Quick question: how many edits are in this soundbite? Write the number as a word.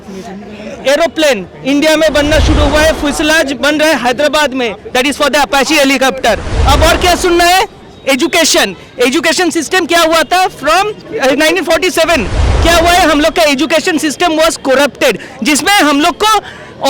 two